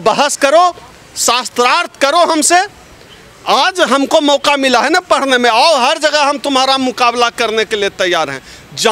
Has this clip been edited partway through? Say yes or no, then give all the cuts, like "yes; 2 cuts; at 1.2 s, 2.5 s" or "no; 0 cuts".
no; 0 cuts